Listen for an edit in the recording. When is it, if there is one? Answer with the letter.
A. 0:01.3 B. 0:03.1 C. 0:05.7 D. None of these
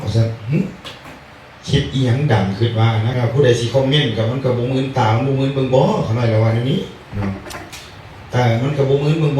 B